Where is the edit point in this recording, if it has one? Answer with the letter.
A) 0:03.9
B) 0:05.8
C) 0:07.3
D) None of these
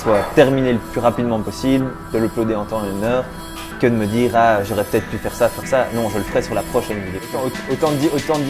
C